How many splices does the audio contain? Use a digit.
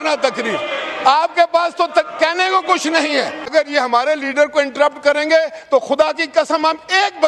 1